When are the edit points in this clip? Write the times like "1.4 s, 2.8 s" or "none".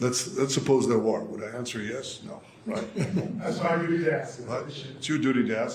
none